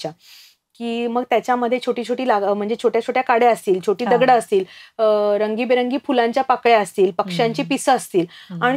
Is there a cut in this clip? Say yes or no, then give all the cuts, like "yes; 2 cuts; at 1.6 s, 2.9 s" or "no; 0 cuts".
no; 0 cuts